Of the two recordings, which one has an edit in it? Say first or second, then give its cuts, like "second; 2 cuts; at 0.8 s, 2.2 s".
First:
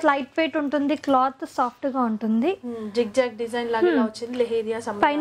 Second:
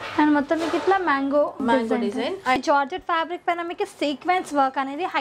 second; 2 cuts; at 1.6 s, 2.6 s